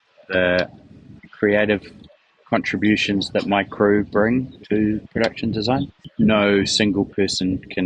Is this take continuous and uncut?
no; 1 cut; at 6.0 s

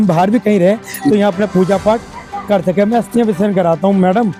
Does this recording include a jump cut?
no; 0 cuts

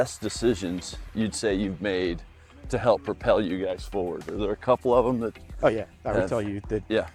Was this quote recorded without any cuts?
yes; 0 cuts

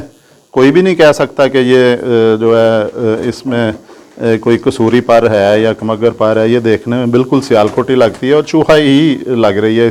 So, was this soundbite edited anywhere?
no; 0 cuts

